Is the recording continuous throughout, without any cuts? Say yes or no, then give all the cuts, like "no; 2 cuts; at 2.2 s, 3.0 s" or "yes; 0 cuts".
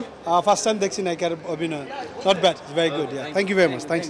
yes; 0 cuts